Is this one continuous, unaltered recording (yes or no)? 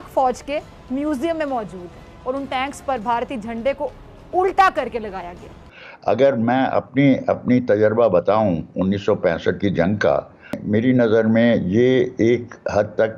no